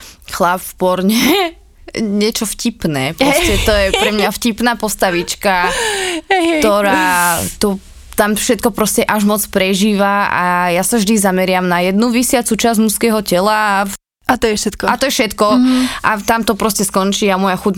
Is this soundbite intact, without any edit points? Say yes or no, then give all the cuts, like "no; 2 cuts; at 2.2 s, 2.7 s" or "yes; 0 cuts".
yes; 0 cuts